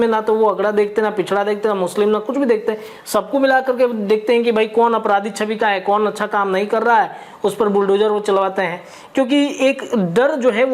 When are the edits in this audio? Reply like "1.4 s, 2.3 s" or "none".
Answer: none